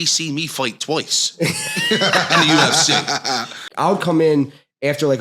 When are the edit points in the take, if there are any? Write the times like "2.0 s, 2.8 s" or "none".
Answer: 3.6 s